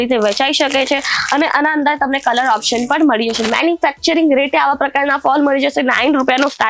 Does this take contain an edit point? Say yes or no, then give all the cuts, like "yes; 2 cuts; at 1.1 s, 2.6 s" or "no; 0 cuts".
yes; 1 cut; at 3.4 s